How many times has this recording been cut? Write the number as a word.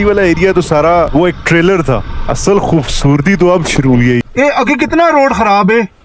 three